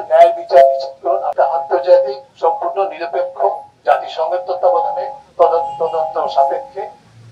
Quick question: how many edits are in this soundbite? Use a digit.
1